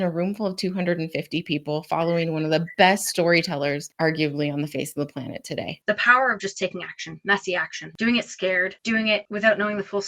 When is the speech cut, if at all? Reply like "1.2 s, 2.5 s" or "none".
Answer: 3.9 s, 5.7 s, 7.8 s, 9.2 s